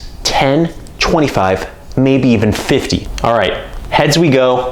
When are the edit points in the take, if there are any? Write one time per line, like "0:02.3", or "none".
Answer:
0:03.1